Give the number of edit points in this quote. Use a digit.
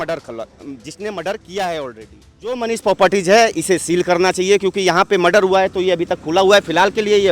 1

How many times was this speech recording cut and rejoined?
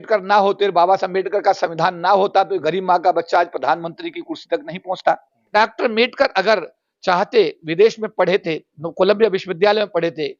1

